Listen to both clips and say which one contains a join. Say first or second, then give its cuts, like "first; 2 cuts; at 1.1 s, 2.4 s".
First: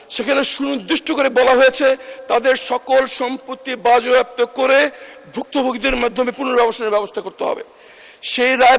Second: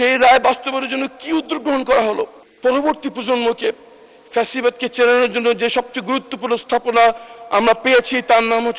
second; 1 cut; at 2.4 s